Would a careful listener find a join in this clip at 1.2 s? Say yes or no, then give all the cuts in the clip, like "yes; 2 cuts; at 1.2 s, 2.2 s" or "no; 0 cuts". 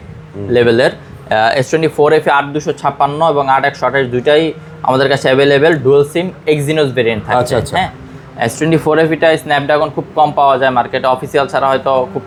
no; 0 cuts